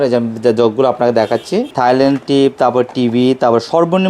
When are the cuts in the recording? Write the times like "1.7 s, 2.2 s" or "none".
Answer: 1.7 s